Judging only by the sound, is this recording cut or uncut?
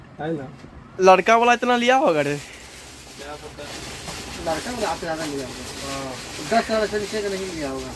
cut